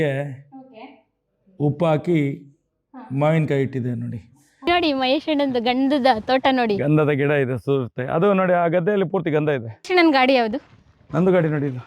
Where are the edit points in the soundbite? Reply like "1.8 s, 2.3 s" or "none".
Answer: 4.7 s, 9.9 s